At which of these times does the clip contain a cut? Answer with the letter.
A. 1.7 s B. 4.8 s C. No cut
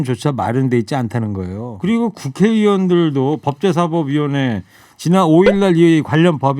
A